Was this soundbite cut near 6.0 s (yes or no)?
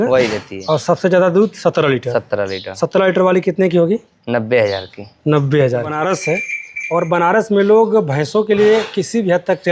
yes